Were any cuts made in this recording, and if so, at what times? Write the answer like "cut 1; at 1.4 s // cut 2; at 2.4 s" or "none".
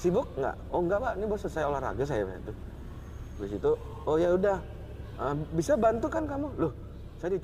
none